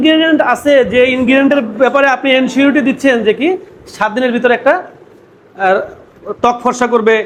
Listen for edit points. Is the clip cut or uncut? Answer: uncut